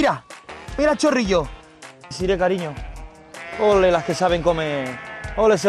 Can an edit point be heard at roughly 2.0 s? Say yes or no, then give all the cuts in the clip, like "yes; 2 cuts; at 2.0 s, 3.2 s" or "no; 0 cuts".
yes; 1 cut; at 2.0 s